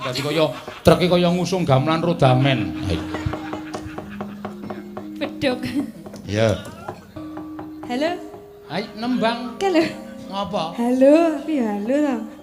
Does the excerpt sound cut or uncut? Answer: cut